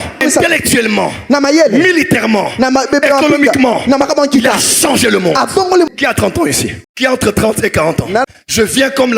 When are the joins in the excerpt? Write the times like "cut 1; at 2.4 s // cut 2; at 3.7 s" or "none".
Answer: cut 1; at 8.3 s